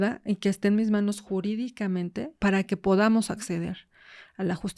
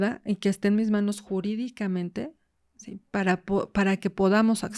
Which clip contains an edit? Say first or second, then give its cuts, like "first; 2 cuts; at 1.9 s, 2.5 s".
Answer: first; 1 cut; at 2.3 s